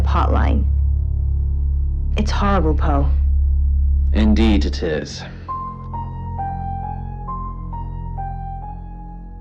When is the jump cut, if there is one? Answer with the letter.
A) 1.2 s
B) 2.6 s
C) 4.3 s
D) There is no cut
B